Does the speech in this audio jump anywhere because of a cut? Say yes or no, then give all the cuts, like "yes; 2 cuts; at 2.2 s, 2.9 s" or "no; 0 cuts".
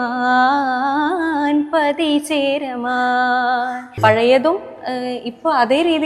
yes; 1 cut; at 3.9 s